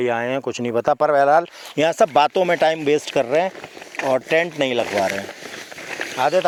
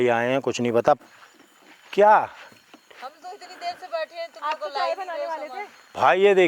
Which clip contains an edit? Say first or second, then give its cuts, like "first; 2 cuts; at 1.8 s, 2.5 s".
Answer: second; 1 cut; at 1.0 s